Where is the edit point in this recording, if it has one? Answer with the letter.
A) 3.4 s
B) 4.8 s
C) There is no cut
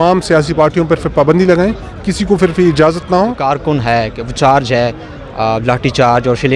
A